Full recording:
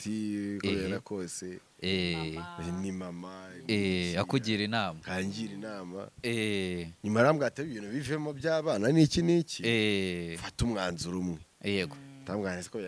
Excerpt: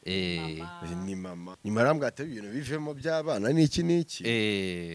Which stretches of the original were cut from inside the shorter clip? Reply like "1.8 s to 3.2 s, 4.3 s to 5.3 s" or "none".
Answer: 3.3 s to 6.9 s